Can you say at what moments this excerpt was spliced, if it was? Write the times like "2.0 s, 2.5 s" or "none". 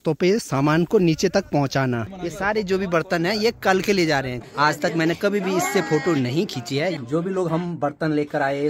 2.1 s, 4.4 s, 7.0 s

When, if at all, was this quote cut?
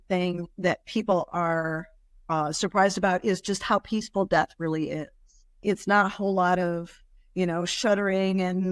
none

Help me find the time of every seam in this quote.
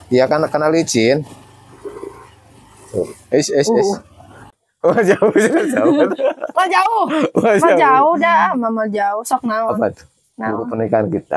4.5 s

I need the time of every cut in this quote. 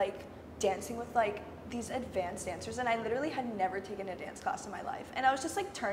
none

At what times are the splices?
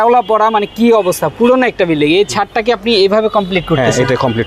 none

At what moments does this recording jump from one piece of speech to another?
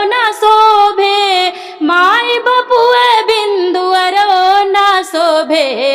none

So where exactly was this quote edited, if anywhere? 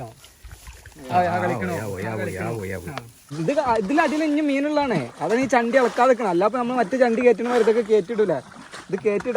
3.3 s

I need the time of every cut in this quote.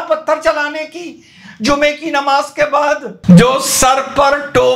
3.2 s

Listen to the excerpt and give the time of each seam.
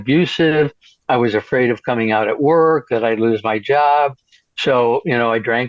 none

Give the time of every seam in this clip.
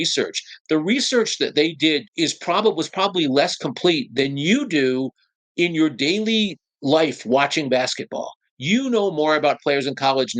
2.1 s

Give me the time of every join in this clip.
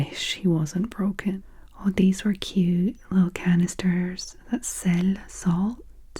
1.3 s

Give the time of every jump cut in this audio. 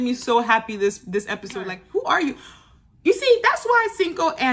1.8 s

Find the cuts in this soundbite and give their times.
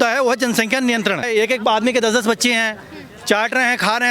1.3 s

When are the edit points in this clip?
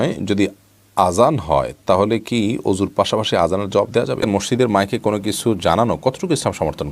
4.2 s

